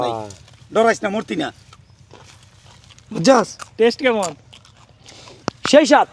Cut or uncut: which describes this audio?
uncut